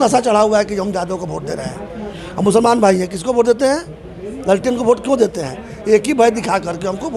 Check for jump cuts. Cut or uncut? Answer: uncut